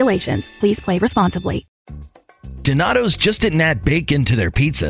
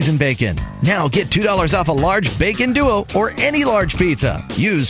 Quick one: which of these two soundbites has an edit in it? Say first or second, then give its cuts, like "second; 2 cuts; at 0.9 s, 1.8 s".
first; 1 cut; at 1.8 s